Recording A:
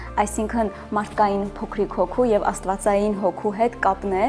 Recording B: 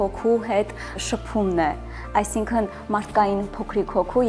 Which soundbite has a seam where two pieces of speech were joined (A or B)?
B